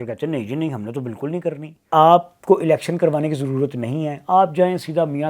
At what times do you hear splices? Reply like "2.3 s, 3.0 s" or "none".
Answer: 1.9 s